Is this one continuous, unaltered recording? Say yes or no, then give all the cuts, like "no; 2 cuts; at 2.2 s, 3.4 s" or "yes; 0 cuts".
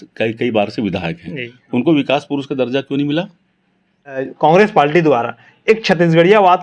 no; 1 cut; at 4.3 s